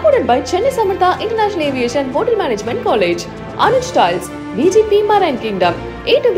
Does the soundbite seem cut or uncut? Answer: uncut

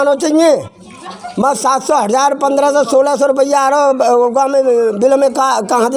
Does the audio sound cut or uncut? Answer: uncut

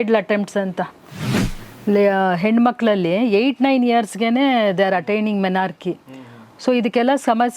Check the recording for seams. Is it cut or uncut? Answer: cut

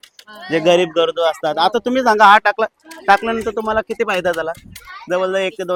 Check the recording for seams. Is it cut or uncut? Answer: uncut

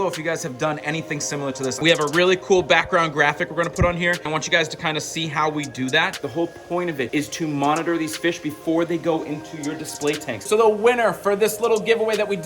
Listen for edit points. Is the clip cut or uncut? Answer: cut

